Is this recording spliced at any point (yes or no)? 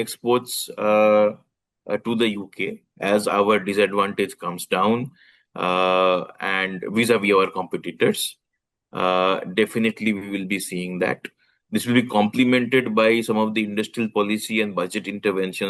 no